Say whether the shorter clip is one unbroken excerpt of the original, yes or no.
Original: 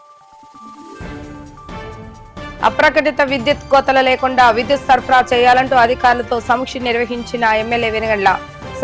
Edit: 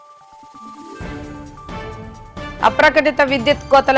yes